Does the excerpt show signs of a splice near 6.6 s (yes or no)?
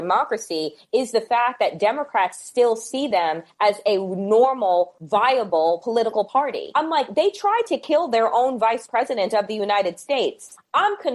yes